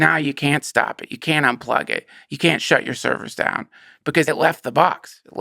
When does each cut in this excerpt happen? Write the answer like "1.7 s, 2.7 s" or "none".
4.2 s

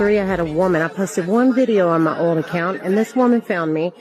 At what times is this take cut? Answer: none

